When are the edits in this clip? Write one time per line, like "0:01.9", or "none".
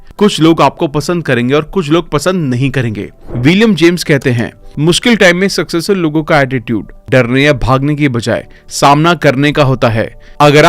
0:03.1